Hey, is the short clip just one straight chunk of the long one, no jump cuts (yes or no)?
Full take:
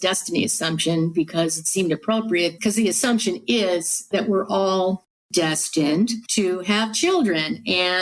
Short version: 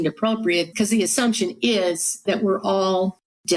yes